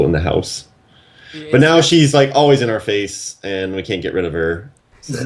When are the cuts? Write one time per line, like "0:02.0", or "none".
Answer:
none